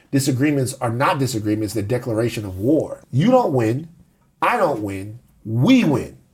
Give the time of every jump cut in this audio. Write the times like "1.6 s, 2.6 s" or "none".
3.0 s